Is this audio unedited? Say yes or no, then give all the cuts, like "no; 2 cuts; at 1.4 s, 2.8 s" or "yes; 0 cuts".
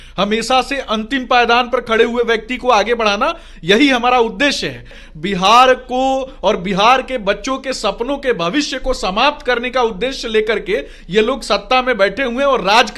no; 1 cut; at 5.0 s